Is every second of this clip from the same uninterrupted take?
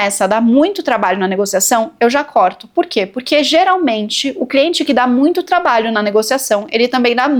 yes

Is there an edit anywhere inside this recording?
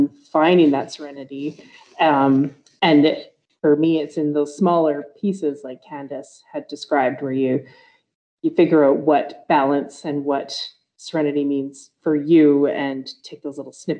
no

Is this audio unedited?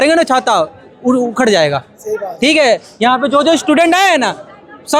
yes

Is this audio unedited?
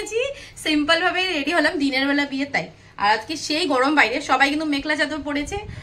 yes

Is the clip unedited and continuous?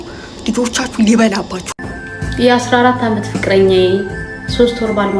no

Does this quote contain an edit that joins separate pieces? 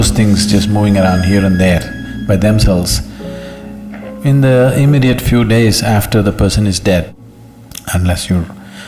yes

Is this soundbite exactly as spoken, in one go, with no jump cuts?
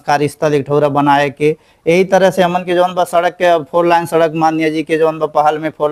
yes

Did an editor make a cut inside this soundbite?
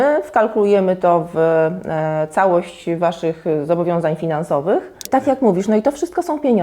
yes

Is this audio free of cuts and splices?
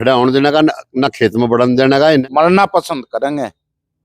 no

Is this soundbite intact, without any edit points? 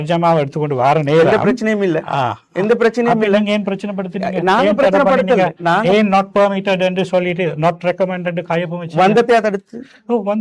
yes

